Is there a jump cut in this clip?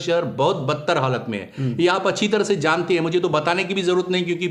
no; 0 cuts

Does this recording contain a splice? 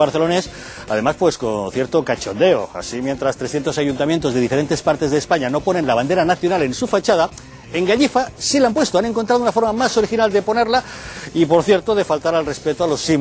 no; 0 cuts

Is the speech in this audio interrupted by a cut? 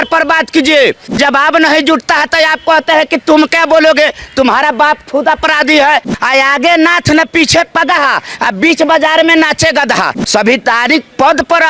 yes; 3 cuts; at 1.2 s, 6.1 s, 10.2 s

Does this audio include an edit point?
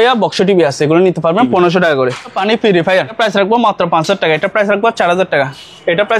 yes; 2 cuts; at 2.4 s, 3.1 s

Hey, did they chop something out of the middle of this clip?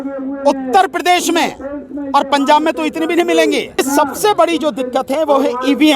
yes; 1 cut; at 3.8 s

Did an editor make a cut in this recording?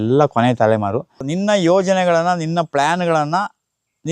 yes; 1 cut; at 1.2 s

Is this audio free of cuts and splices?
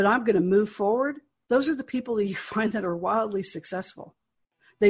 yes; 0 cuts

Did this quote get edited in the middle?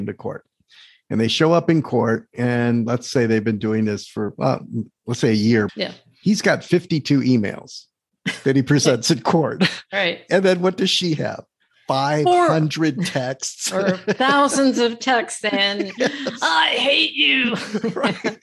yes; 1 cut; at 5.7 s

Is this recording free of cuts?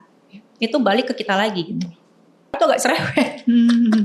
no; 1 cut; at 2.6 s

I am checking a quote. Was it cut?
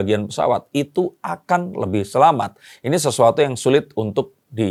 no; 0 cuts

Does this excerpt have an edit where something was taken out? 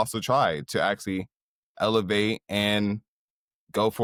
no; 0 cuts

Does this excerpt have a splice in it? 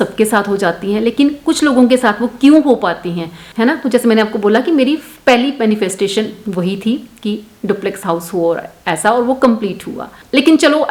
no; 0 cuts

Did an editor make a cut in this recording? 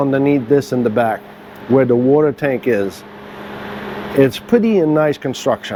no; 0 cuts

